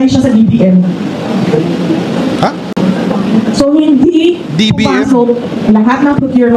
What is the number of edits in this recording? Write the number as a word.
one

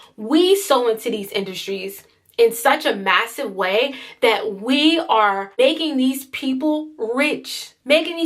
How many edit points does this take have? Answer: one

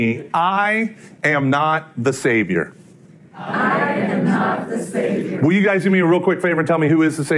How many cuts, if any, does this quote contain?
one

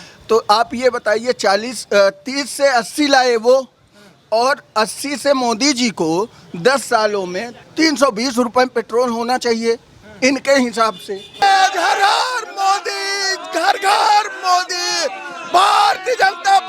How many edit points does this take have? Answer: two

